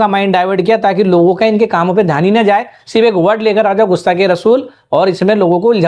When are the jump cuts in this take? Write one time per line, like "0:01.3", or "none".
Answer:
none

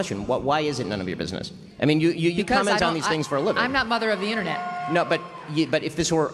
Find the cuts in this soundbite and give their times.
0:01.5

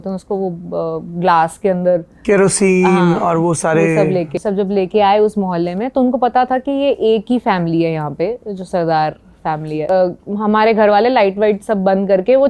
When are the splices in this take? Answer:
0:04.3
0:09.9

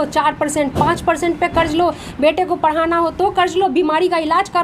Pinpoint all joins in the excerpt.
0:02.1

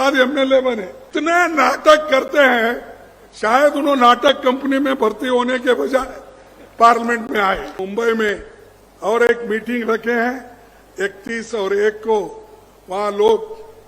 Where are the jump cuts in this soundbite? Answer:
0:01.1
0:07.7

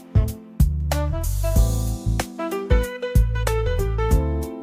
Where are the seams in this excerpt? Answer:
none

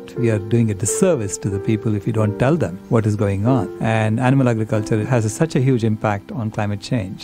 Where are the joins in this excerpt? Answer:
none

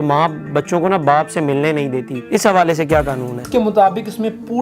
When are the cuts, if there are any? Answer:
0:02.1
0:03.5

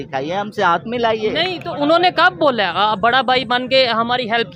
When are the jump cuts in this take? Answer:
none

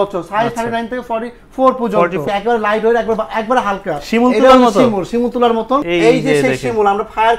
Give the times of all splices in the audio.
0:02.2
0:05.9

